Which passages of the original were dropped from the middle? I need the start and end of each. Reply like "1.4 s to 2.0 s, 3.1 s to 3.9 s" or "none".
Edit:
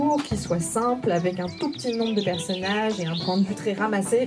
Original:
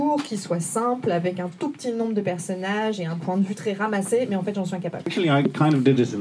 none